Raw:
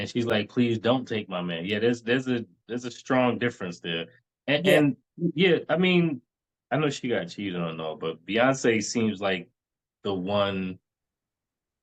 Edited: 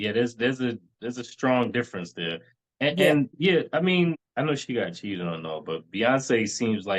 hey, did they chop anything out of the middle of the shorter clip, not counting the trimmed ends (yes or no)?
yes